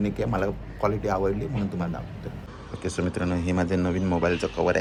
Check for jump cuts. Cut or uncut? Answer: uncut